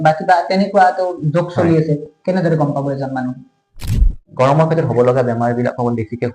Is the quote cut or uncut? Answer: cut